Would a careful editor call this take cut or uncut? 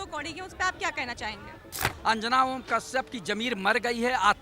cut